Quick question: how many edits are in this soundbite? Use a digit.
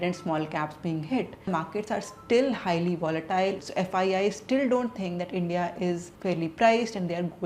2